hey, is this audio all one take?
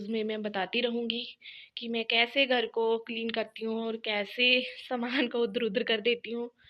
yes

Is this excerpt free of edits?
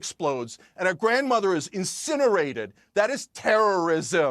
yes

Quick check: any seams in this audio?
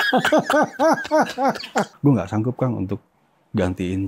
yes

